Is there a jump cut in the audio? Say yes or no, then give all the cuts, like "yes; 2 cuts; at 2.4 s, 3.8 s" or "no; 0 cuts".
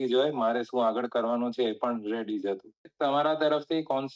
yes; 1 cut; at 2.9 s